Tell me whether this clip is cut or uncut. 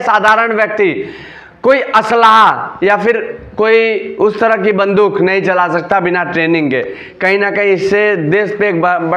uncut